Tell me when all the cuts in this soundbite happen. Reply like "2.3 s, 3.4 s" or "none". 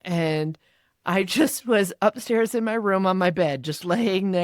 none